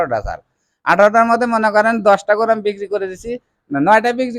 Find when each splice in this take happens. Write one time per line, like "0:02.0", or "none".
none

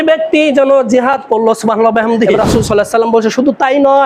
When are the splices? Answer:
0:02.3

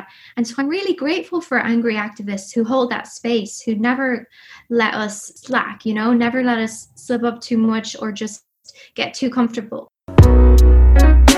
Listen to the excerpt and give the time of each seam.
0:05.7
0:09.8

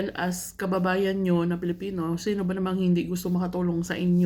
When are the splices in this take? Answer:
none

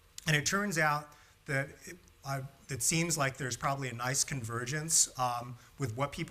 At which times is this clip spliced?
0:03.2

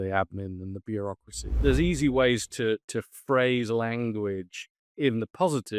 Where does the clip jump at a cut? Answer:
0:01.6

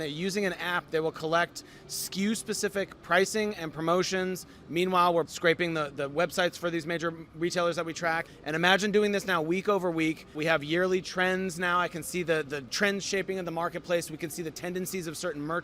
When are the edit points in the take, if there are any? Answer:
0:05.3
0:08.3
0:10.4
0:12.6

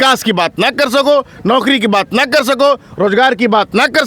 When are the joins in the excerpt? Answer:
none

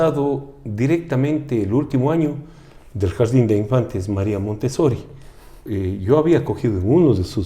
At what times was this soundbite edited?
0:05.6

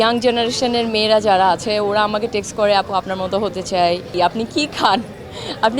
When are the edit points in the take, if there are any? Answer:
0:04.1

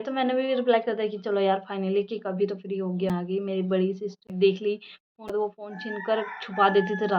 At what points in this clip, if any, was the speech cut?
0:03.1
0:04.3
0:05.6

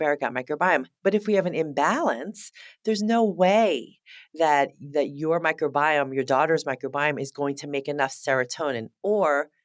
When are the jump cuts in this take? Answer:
0:00.9

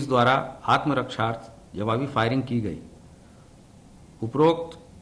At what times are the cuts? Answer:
none

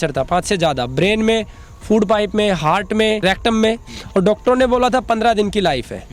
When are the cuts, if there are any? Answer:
0:03.2

